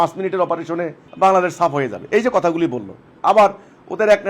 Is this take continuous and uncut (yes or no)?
no